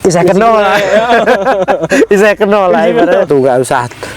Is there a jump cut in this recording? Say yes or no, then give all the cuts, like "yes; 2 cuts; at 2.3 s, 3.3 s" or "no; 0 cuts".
yes; 1 cut; at 3.3 s